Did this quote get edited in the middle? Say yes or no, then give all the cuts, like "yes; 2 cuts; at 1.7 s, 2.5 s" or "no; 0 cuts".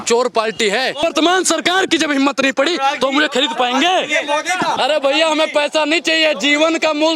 yes; 2 cuts; at 1.0 s, 4.7 s